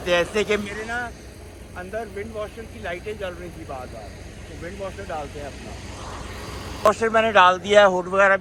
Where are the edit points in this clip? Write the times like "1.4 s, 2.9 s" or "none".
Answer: none